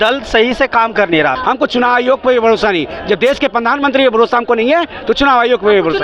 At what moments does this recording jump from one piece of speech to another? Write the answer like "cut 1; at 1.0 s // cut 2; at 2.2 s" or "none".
cut 1; at 1.3 s